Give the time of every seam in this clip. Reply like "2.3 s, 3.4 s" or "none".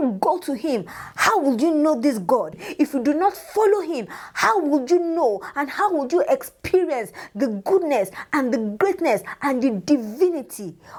none